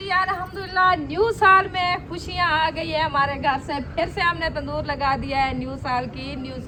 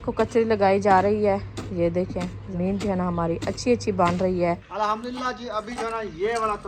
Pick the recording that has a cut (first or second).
second